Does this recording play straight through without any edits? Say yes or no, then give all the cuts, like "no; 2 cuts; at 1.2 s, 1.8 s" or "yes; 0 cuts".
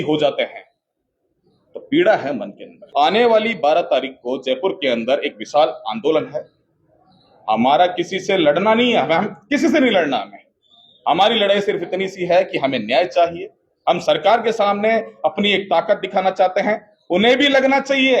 no; 1 cut; at 2.8 s